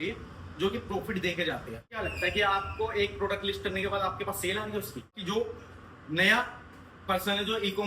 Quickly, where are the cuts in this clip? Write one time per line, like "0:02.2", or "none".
0:02.0
0:05.2